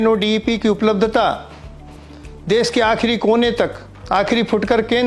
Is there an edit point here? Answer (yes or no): no